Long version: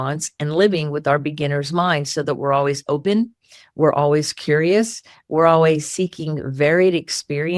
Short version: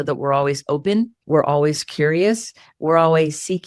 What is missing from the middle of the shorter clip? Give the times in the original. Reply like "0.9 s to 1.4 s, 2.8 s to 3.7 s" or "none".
3.4 s to 3.7 s